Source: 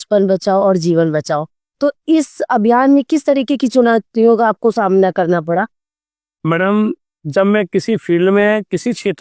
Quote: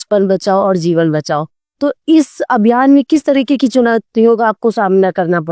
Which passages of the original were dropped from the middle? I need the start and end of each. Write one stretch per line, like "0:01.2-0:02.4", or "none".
none

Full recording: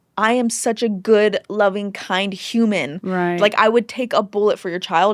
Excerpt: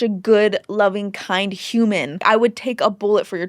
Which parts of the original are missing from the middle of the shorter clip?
0:03.0-0:03.5

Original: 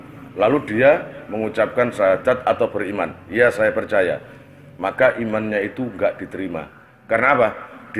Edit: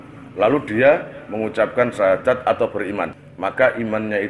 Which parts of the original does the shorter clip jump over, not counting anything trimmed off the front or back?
0:03.2-0:04.6

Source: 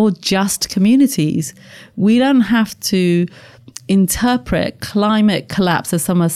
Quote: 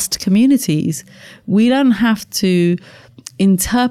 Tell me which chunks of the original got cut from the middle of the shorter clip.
none

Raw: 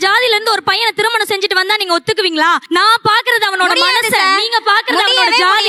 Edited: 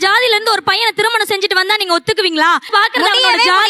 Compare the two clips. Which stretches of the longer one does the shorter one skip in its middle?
0:02.7-0:04.6

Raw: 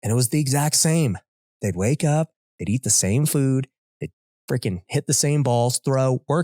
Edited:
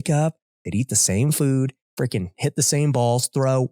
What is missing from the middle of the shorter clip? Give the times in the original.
0:03.8-0:04.3

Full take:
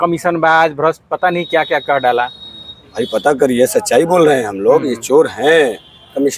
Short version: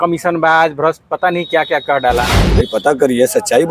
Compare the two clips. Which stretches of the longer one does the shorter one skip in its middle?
0:02.4-0:02.8

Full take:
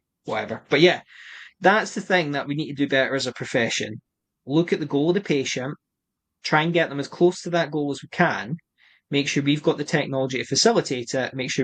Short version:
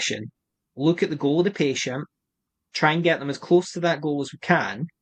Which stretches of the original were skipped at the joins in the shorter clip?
none

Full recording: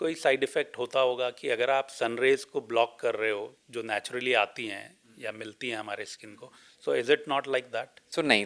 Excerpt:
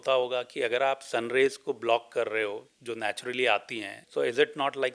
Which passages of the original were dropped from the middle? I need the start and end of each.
0:04.8-0:06.7

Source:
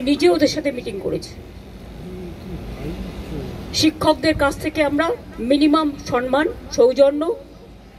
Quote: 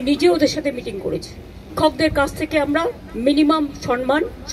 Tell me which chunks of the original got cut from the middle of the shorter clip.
0:01.7-0:04.0

